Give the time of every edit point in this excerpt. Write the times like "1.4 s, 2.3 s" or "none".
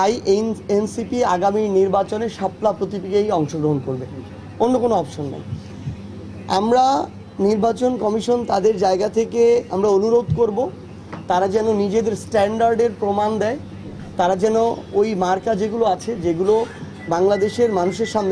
5.5 s

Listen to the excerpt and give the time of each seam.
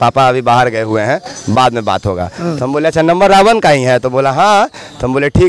none

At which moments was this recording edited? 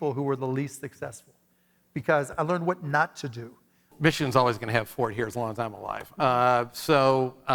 4.0 s

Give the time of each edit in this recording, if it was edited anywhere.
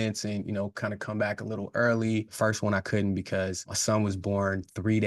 2.3 s, 3.7 s

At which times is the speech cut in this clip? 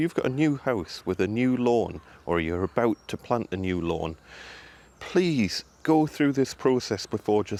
none

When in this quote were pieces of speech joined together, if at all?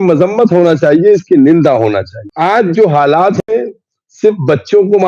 2.2 s

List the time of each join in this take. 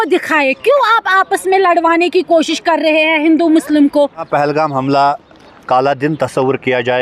4.2 s

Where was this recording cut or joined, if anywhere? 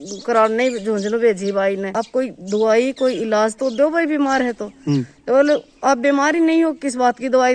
1.9 s

